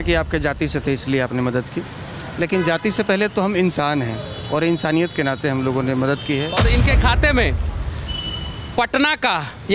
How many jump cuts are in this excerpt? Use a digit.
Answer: 1